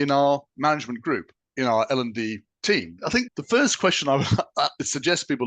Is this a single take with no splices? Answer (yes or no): no